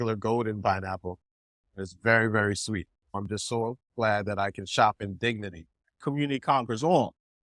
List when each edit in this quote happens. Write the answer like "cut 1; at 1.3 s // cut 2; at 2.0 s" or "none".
cut 1; at 3.0 s // cut 2; at 6.0 s